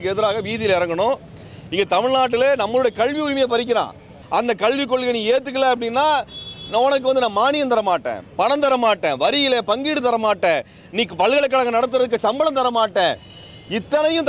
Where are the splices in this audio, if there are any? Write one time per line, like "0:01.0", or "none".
0:04.1